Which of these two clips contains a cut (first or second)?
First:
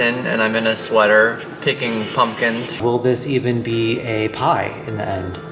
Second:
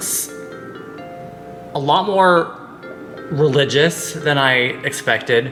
first